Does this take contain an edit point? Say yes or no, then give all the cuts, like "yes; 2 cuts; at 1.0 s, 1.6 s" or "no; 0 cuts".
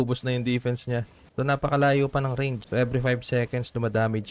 yes; 2 cuts; at 1.2 s, 2.6 s